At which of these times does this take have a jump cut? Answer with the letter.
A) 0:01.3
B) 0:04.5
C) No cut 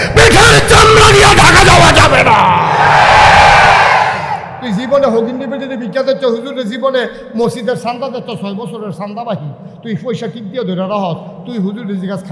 B